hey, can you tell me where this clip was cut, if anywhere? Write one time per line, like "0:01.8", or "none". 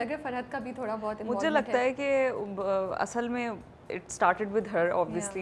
none